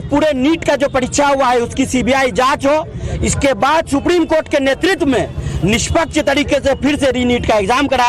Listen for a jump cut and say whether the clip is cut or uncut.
uncut